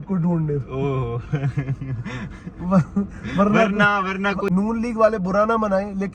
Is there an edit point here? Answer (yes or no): yes